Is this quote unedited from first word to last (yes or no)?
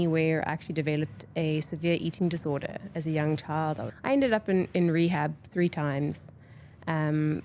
no